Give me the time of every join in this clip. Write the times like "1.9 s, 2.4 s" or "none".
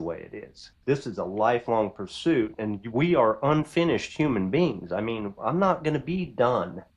none

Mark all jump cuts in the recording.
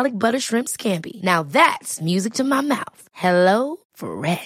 none

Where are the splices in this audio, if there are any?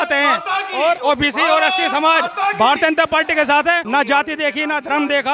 1.0 s, 3.8 s

